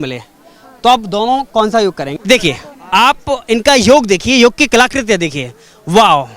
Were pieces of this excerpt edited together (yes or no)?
yes